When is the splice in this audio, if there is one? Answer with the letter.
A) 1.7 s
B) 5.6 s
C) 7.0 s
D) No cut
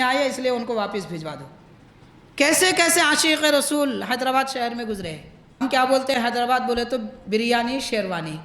B